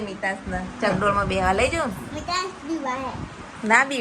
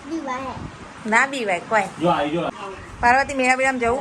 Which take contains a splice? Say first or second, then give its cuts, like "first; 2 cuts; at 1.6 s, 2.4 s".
second; 1 cut; at 2.5 s